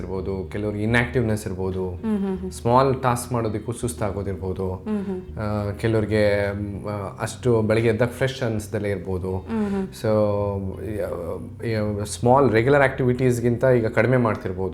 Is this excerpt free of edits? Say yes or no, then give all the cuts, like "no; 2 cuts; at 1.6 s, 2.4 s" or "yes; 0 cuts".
yes; 0 cuts